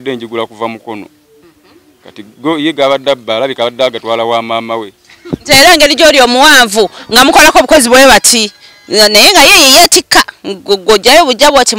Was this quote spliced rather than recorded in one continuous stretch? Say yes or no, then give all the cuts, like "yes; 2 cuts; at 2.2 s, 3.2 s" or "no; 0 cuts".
no; 0 cuts